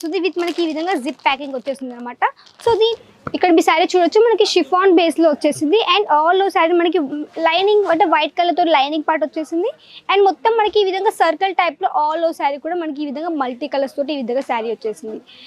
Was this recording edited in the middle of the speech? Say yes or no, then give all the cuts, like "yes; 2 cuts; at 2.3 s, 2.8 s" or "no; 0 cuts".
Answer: yes; 1 cut; at 2.9 s